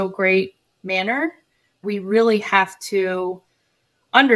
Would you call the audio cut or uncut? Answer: cut